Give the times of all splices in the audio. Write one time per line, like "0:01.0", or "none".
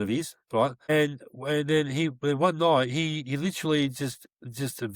none